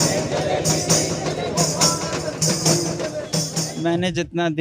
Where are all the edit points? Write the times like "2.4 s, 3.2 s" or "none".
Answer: 3.5 s